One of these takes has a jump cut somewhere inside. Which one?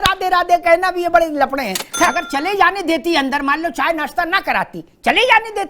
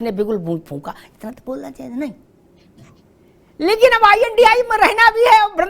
first; 1 cut; at 2.1 s

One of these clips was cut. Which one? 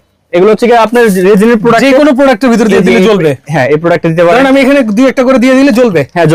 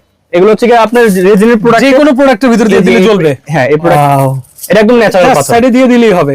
second; 1 cut; at 3.9 s

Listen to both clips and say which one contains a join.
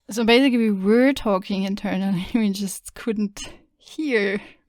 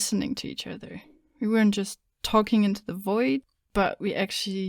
second; 1 cut; at 3.6 s

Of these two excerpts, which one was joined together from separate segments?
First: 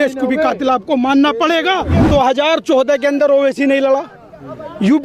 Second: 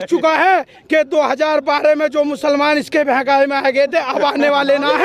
first; 1 cut; at 2.0 s

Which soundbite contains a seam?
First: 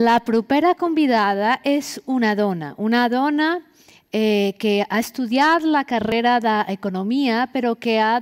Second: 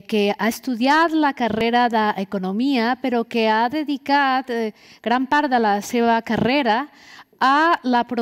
first; 1 cut; at 1.3 s

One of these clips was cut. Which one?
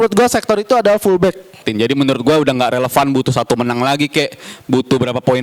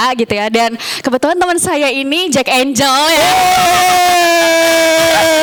first; 1 cut; at 1.7 s

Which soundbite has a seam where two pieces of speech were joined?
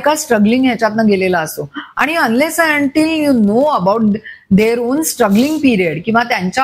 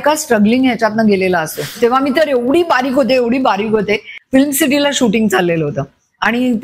second; 2 cuts; at 1.8 s, 4.1 s

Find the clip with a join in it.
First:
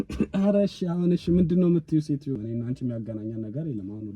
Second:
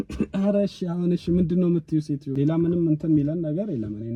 first; 1 cut; at 2.3 s

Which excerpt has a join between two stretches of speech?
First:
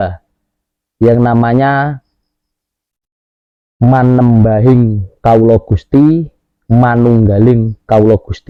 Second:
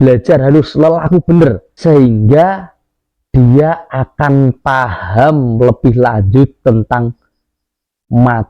second; 1 cut; at 1.7 s

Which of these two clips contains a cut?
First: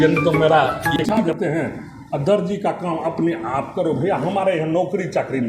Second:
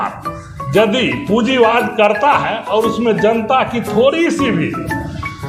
first; 1 cut; at 1.0 s

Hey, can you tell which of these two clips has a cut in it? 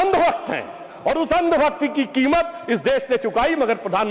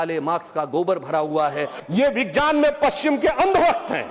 second; 1 cut; at 1.7 s

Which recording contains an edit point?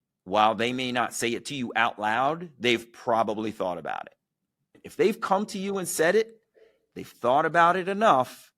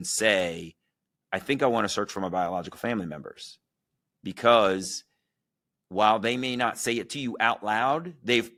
first; 1 cut; at 4.8 s

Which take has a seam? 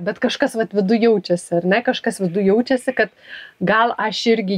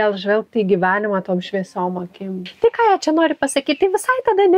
second; 1 cut; at 2.5 s

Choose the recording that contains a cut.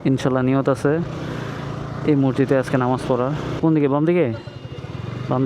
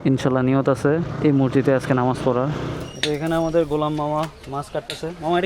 second; 2 cuts; at 1.1 s, 2.7 s

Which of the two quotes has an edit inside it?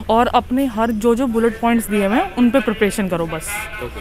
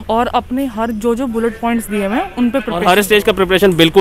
second; 1 cut; at 2.8 s

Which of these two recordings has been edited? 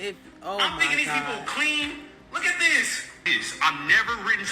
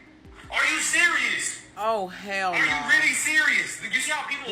first; 1 cut; at 3.4 s

